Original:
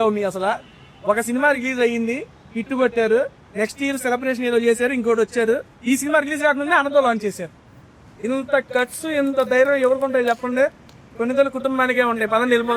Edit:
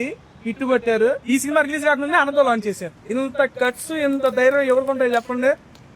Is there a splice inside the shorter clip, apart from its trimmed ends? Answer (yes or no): yes